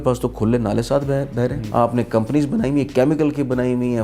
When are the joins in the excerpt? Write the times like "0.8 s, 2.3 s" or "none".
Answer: 1.6 s

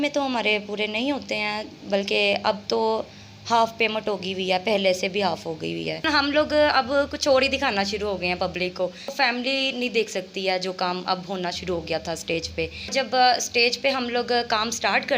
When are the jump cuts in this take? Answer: 6.1 s, 9.1 s, 12.9 s

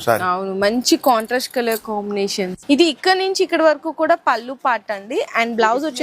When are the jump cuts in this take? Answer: 2.6 s

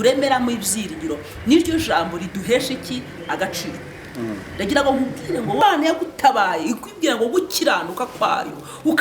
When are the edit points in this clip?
5.6 s

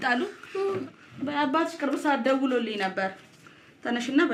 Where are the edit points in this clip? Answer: none

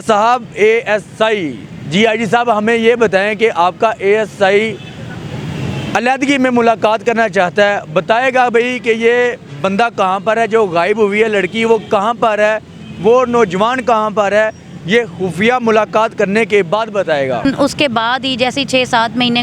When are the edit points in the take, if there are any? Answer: 17.4 s

